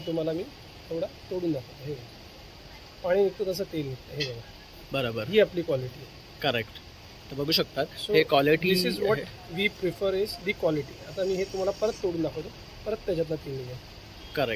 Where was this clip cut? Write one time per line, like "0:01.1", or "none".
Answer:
none

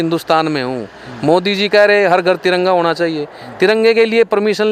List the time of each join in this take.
none

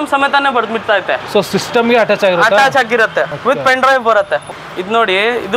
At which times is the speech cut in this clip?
0:03.3
0:04.5

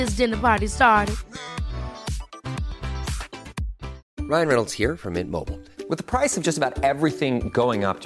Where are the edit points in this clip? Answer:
none

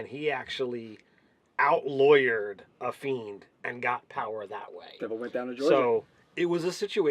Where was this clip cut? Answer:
0:04.1

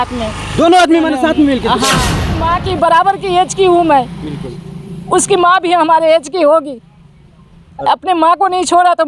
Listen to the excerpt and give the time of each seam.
0:02.2

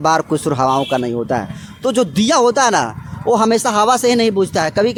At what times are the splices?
none

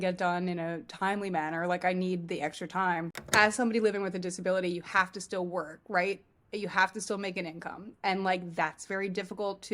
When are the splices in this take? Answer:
0:03.2

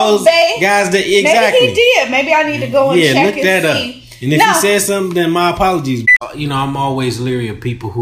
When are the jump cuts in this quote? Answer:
0:06.0

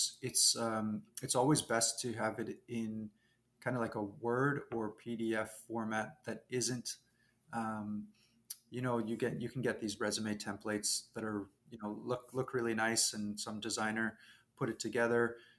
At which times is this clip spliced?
none

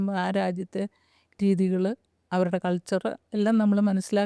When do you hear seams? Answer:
none

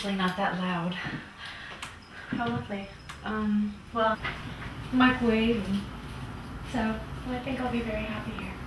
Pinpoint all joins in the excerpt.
none

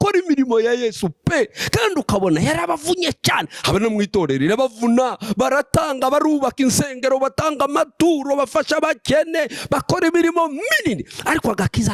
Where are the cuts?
none

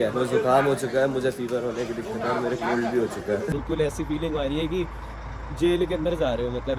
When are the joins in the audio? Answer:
0:03.5

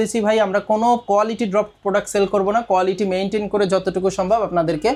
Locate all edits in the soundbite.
none

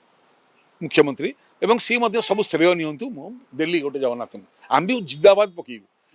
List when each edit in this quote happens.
none

